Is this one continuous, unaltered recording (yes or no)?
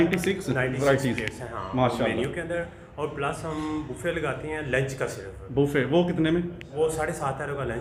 yes